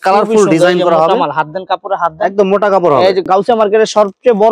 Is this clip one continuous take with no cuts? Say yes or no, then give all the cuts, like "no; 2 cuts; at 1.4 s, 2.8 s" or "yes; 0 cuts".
no; 1 cut; at 3.3 s